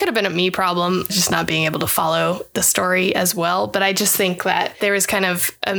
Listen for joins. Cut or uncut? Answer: uncut